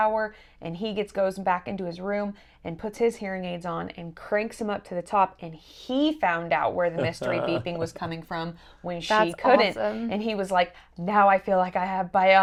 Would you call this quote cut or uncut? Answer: uncut